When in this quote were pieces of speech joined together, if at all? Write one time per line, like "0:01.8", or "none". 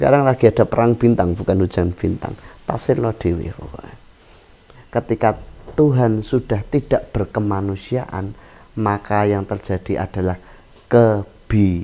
0:04.8

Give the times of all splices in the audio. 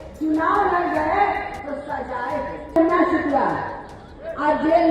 0:02.8

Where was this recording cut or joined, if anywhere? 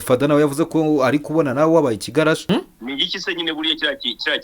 0:02.4

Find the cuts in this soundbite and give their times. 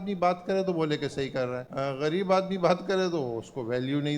0:01.6

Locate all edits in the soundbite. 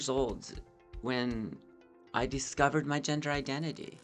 none

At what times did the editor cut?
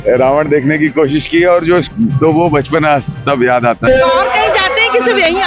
0:01.9
0:03.9

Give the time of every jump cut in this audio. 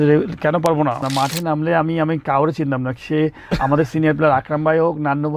0:01.0

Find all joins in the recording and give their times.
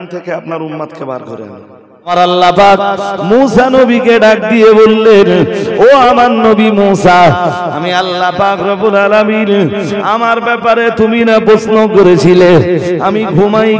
0:02.1

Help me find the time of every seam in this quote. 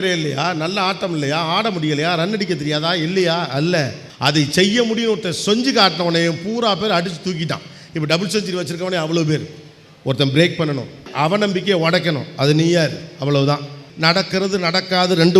0:04.0
0:11.1
0:13.8

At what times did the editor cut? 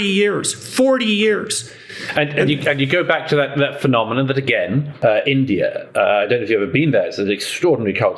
0:04.9

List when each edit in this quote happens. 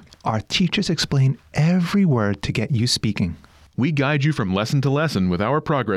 none

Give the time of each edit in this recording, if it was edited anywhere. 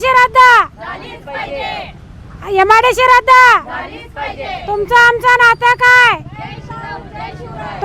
none

